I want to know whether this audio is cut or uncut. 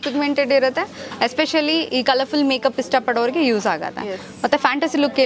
uncut